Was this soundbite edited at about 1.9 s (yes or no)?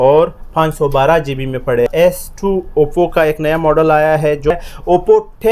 yes